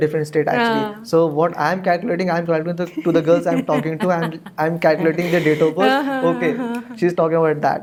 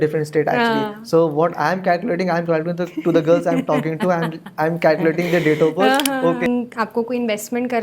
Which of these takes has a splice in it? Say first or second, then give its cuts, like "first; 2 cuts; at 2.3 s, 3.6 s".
second; 1 cut; at 6.5 s